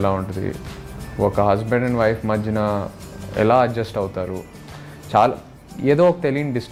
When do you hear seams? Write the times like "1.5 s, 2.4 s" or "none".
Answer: none